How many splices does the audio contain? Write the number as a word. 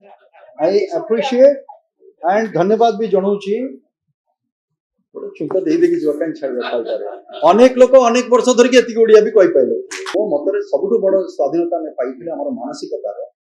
one